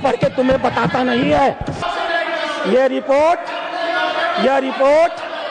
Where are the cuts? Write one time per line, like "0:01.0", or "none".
none